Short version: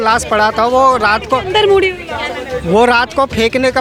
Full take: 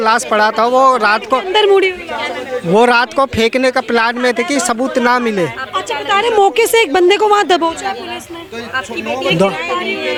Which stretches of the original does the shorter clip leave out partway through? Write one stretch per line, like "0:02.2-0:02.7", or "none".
none